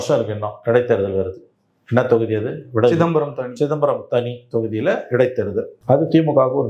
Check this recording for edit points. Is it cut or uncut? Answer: cut